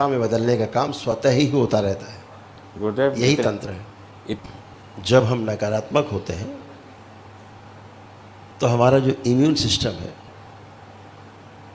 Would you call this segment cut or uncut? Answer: cut